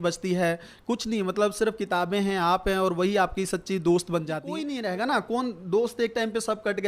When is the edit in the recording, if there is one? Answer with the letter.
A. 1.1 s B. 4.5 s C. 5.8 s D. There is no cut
B